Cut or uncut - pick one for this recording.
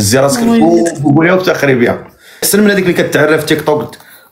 cut